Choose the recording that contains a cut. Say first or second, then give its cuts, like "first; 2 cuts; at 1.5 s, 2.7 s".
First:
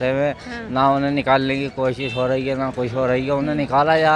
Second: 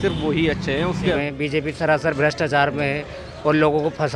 second; 1 cut; at 1.2 s